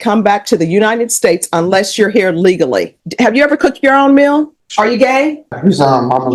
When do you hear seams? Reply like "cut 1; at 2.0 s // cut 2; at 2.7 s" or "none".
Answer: cut 1; at 3.0 s // cut 2; at 4.6 s // cut 3; at 5.6 s